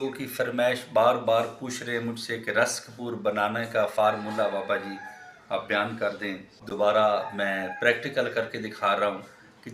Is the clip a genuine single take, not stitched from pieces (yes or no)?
yes